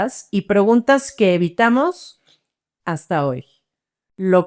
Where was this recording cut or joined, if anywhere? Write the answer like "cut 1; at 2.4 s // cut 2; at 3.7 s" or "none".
none